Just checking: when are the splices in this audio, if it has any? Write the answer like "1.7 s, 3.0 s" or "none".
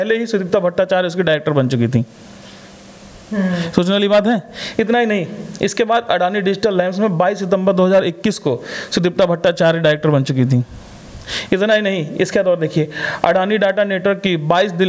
none